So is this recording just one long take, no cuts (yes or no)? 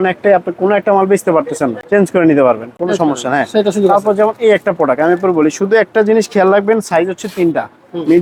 yes